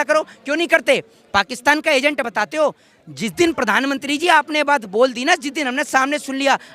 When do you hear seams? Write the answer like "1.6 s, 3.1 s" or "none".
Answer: none

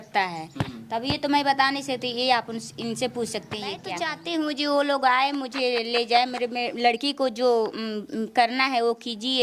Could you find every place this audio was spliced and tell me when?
3.9 s

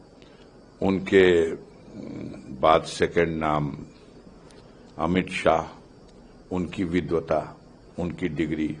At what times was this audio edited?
none

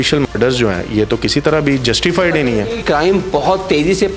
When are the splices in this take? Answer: 2.8 s

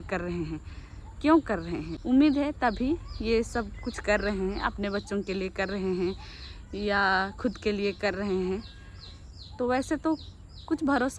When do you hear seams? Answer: 1.9 s

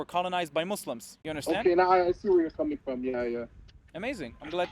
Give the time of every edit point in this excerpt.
1.1 s

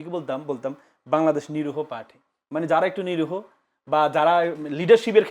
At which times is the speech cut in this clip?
none

